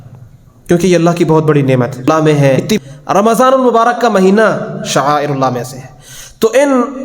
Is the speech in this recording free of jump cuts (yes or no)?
no